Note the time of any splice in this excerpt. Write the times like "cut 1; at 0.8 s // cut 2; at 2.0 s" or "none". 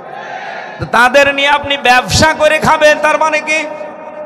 none